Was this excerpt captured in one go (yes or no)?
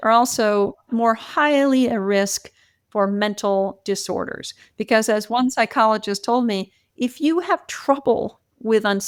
yes